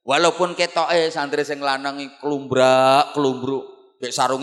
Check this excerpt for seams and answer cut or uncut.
uncut